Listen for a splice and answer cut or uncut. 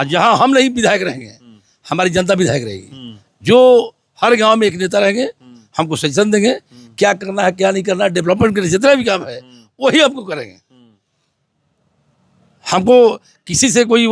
uncut